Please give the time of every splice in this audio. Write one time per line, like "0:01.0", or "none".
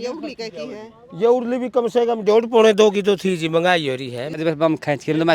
0:04.4